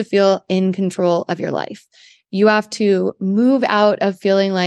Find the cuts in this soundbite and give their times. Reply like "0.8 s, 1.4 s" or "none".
none